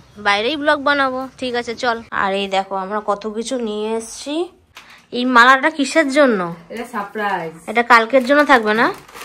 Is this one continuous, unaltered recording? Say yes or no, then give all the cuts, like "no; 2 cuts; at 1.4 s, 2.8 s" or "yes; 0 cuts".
no; 2 cuts; at 2.1 s, 4.8 s